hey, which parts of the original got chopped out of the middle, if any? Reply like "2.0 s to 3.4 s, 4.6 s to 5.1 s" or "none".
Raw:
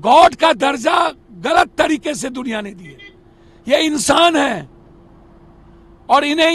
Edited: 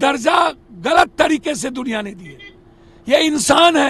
none